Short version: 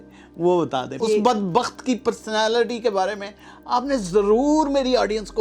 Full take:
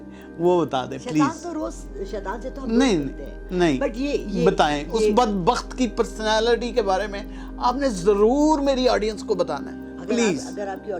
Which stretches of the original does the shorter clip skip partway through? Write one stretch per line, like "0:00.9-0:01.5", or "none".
0:00.9-0:04.8

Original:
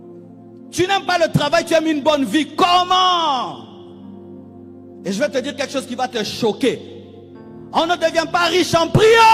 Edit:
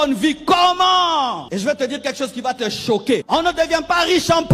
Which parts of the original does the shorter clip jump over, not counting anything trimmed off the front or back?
0:03.5-0:05.0
0:06.8-0:07.7

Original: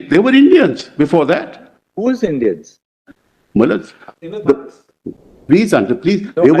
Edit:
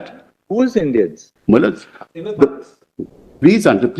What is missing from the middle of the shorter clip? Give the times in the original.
0:02.7-0:03.3

